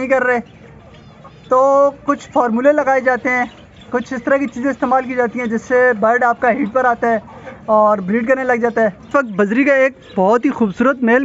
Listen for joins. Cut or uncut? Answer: cut